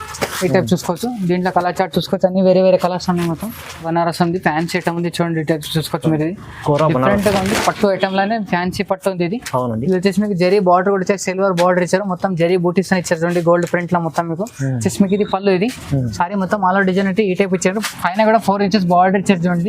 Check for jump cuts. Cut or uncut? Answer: cut